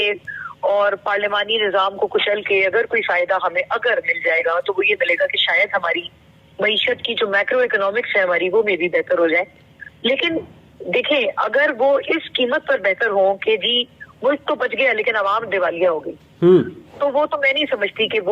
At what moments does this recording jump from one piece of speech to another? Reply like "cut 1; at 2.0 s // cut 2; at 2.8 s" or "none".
none